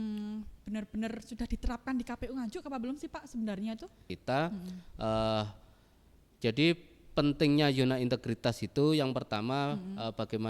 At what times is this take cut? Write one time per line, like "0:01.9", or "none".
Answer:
0:04.1